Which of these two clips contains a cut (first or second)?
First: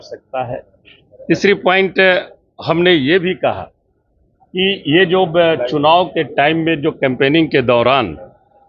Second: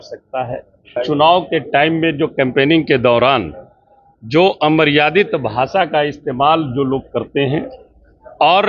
second